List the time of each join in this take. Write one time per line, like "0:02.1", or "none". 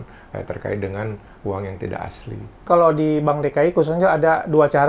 0:02.6